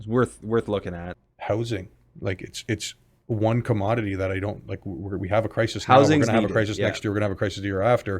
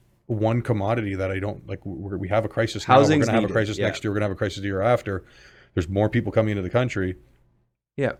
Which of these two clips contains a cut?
first; 1 cut; at 1.1 s

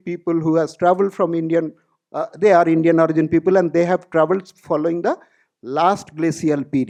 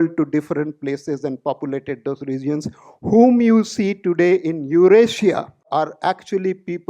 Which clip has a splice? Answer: second; 1 cut; at 5.6 s

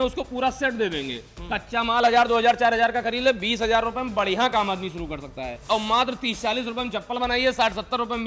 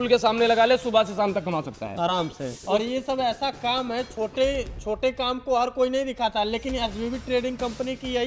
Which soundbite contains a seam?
second; 1 cut; at 2.6 s

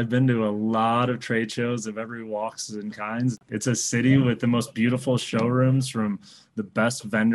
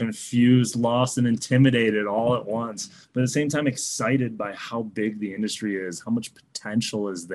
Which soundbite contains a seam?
first; 1 cut; at 3.5 s

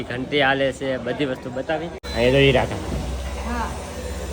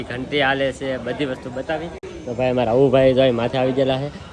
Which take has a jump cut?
first; 1 cut; at 2.0 s

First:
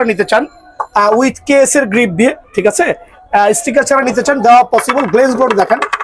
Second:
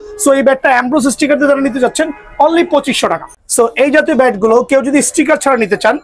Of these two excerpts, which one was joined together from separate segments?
second; 1 cut; at 3.3 s

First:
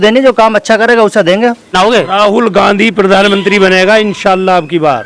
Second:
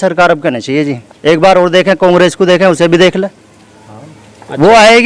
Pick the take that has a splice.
first; 1 cut; at 1.7 s

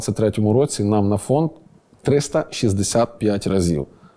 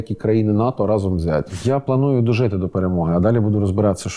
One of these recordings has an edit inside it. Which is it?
second; 1 cut; at 1.5 s

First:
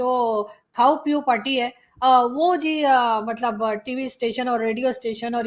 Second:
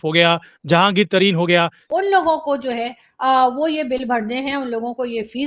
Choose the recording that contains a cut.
second; 1 cut; at 1.8 s

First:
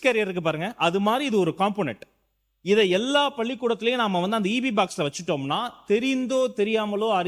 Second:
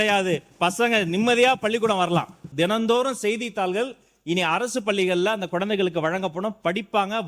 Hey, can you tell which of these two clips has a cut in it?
second; 1 cut; at 2.5 s

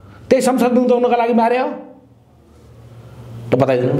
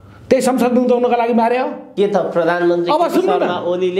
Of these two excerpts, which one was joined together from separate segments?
second; 1 cut; at 1.8 s

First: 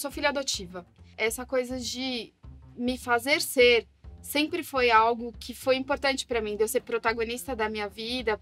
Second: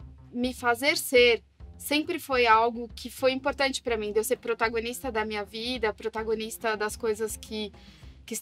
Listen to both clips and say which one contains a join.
first; 1 cut; at 1.1 s

